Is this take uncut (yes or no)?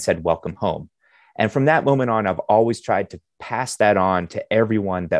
yes